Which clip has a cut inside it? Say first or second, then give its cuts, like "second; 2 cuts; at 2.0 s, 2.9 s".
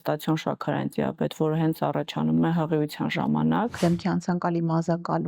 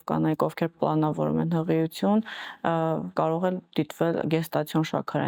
first; 1 cut; at 3.8 s